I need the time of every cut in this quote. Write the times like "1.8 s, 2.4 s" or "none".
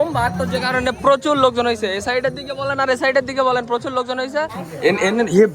4.6 s